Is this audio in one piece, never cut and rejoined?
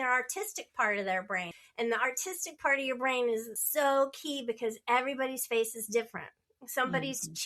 no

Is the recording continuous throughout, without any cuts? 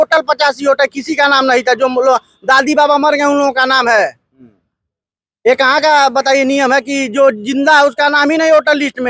yes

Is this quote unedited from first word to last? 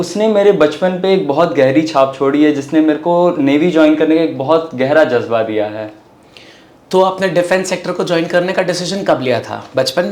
yes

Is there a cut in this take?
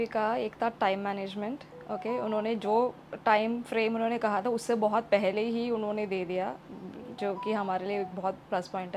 no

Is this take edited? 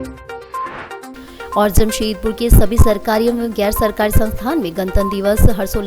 yes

